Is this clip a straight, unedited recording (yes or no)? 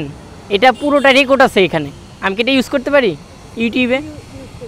yes